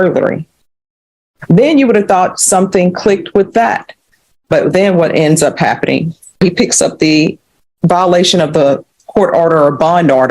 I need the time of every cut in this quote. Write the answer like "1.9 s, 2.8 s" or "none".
6.4 s

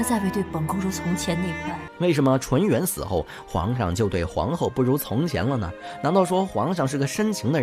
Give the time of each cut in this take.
1.8 s

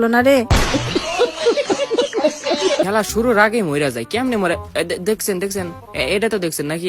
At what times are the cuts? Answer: 2.9 s

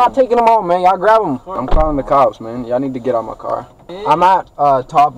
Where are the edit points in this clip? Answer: 1.5 s, 4.0 s

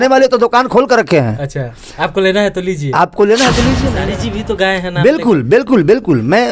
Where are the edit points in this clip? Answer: 3.9 s

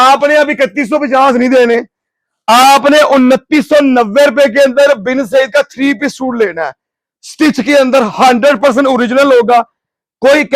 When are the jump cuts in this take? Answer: none

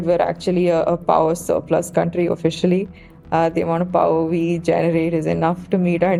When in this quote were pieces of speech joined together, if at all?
none

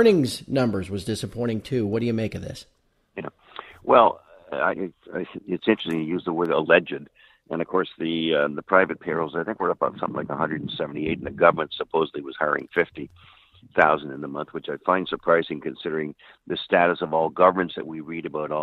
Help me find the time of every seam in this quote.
11.3 s

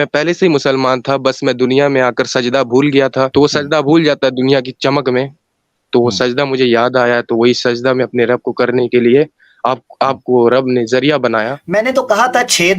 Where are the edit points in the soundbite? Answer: 3.3 s, 11.6 s

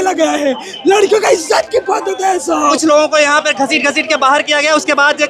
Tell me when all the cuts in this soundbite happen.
2.7 s

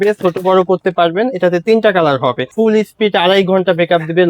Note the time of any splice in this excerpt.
2.5 s

